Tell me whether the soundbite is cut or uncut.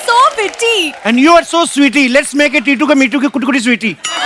uncut